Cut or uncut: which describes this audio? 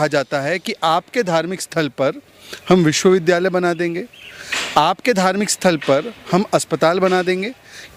uncut